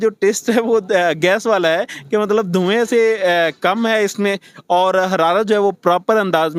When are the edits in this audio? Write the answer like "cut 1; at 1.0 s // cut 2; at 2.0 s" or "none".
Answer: none